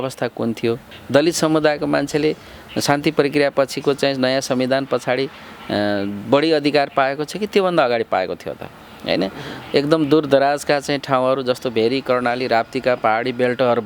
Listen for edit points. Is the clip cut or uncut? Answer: cut